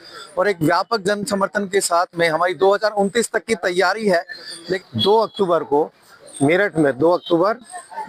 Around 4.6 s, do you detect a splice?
yes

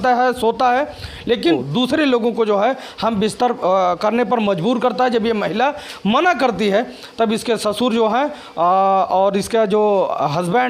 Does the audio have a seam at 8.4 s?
no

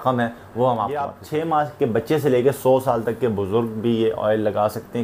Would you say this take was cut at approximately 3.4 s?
no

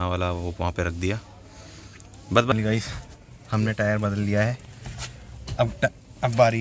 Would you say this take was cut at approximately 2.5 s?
yes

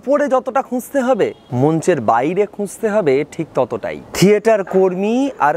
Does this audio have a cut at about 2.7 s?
no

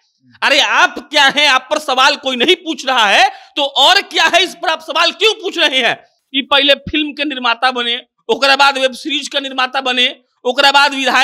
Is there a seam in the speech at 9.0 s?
no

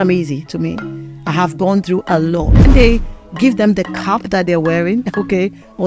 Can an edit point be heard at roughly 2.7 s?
yes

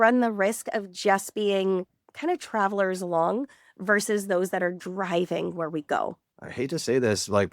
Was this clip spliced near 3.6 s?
no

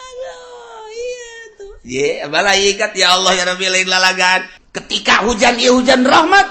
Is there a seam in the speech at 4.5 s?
yes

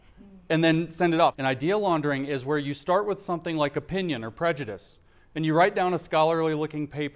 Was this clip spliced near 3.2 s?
no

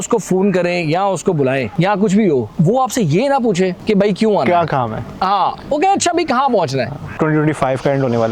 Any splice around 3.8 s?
yes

